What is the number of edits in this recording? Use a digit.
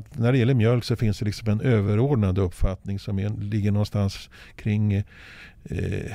0